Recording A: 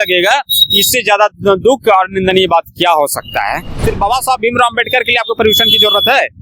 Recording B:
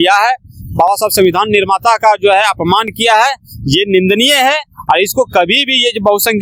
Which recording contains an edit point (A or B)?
A